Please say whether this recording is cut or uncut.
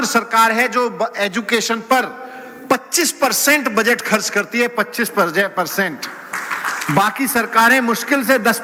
uncut